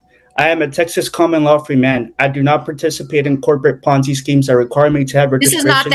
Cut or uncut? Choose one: uncut